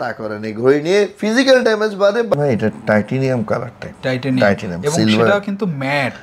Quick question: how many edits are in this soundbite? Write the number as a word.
one